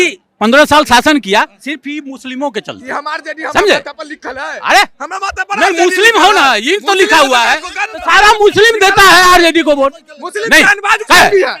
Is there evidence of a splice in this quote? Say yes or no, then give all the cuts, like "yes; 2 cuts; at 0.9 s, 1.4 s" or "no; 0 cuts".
no; 0 cuts